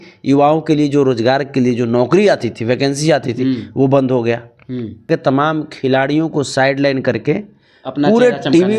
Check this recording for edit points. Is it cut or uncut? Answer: cut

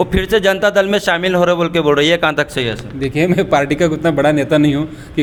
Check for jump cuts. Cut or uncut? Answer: uncut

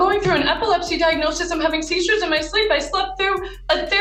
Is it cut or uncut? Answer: uncut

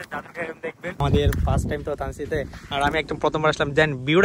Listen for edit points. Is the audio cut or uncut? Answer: cut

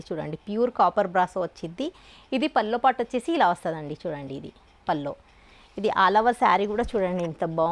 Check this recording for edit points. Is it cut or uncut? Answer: uncut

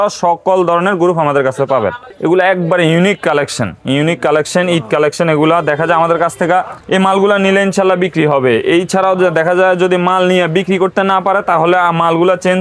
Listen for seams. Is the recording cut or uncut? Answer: uncut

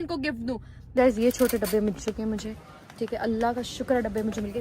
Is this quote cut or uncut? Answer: cut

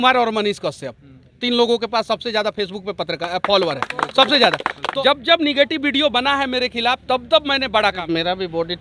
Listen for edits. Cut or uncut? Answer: cut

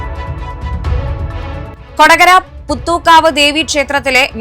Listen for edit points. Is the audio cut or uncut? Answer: cut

